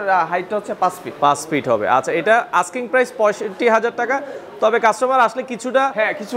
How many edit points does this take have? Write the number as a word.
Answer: zero